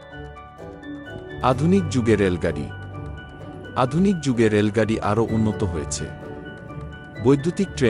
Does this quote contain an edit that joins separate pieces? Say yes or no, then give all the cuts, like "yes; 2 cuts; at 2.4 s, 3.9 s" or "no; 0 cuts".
yes; 1 cut; at 1.2 s